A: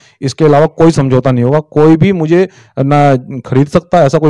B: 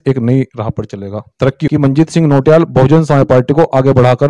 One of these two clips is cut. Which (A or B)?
B